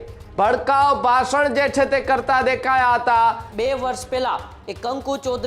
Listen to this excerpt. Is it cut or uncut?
cut